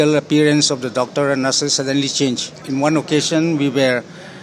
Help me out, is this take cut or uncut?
cut